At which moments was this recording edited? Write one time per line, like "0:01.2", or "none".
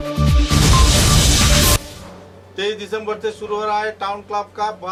none